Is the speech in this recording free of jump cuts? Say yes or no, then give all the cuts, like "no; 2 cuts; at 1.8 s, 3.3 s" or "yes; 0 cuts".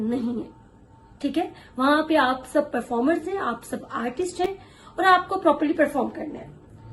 yes; 0 cuts